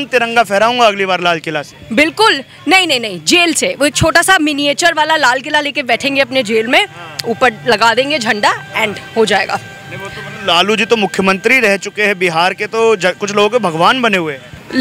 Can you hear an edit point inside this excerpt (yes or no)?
no